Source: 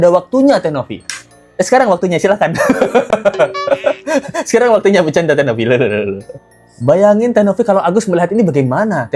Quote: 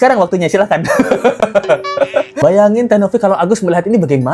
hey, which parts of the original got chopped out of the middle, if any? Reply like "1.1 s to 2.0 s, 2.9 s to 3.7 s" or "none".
4.0 s to 6.8 s